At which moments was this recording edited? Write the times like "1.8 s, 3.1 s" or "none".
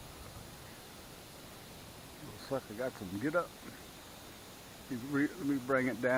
none

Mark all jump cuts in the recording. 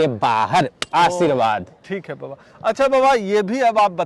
none

